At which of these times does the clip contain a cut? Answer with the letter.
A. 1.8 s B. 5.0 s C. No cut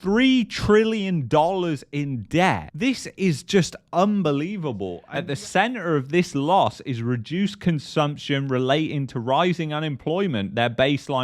B